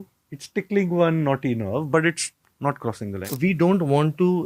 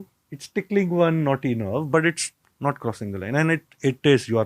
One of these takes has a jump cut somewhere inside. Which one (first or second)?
first